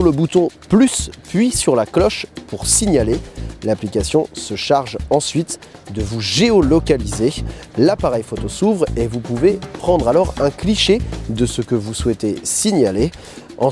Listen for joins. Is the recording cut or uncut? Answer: uncut